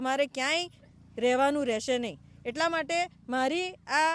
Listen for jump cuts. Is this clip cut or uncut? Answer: uncut